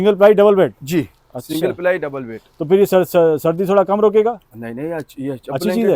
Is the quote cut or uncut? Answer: uncut